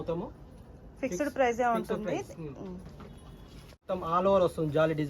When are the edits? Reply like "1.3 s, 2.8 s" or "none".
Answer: 3.9 s